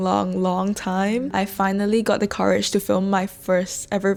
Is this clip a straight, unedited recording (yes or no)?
yes